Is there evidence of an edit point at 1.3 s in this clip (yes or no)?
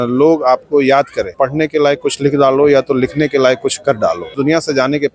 yes